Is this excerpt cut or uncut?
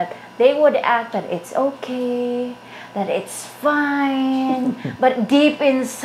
uncut